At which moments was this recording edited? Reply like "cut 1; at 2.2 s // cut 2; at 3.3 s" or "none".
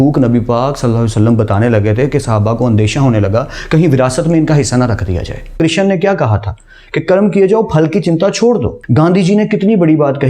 cut 1; at 5.5 s // cut 2; at 8.8 s